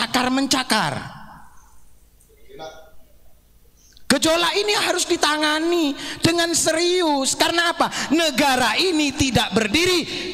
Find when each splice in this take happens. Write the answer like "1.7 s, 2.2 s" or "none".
none